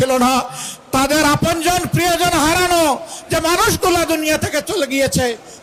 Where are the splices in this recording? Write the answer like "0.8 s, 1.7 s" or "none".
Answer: none